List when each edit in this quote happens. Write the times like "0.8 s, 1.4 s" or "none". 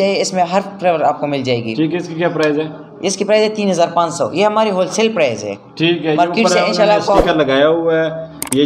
none